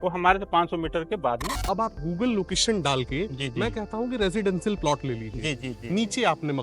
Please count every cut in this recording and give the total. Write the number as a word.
one